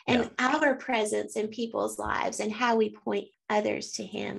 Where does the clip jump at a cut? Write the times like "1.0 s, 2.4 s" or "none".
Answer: 3.3 s